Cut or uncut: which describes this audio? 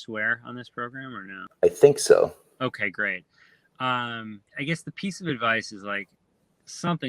cut